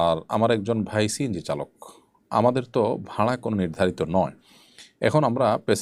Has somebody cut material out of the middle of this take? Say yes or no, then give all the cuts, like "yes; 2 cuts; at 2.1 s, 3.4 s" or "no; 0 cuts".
no; 0 cuts